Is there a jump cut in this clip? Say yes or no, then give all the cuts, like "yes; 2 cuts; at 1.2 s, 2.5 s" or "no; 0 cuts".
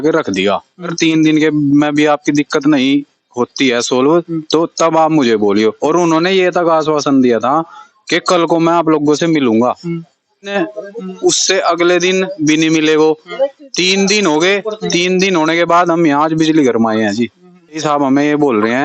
yes; 3 cuts; at 0.9 s, 10.5 s, 17.8 s